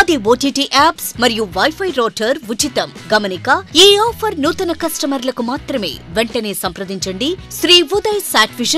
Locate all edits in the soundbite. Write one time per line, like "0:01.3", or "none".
0:07.4